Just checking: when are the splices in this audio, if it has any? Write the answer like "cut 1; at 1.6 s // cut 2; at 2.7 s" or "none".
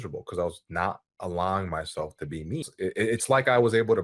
cut 1; at 2.7 s